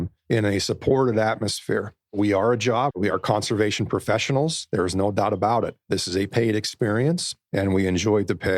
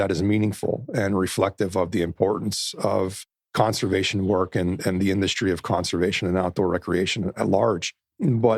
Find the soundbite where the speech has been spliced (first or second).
first